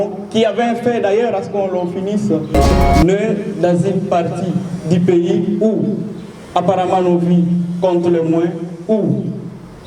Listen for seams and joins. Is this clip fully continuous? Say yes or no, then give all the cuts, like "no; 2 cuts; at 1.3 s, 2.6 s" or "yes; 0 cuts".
no; 1 cut; at 2.7 s